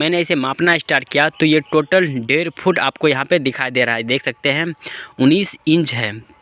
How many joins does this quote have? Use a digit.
0